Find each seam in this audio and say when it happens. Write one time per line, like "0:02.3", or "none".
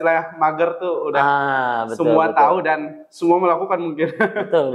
none